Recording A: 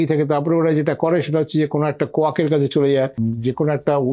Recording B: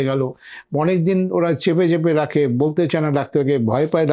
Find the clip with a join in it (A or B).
A